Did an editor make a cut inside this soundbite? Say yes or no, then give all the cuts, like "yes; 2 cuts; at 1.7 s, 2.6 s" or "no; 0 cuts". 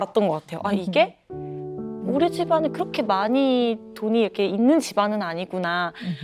no; 0 cuts